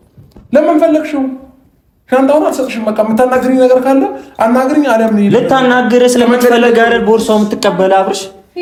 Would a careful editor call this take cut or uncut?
uncut